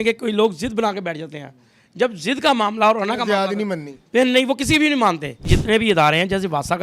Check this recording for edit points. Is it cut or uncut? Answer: cut